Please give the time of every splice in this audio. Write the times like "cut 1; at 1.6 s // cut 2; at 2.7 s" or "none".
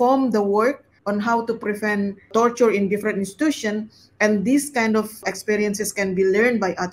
cut 1; at 0.9 s // cut 2; at 2.3 s // cut 3; at 5.2 s